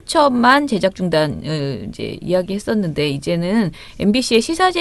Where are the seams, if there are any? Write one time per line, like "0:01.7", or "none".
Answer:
0:02.6